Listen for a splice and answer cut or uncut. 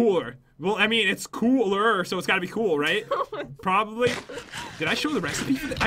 uncut